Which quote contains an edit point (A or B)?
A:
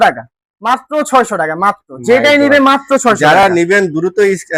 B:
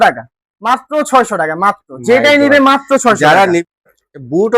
B